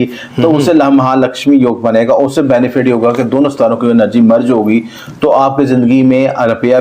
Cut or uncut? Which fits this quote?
uncut